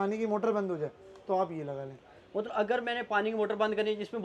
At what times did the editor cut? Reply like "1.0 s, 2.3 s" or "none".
none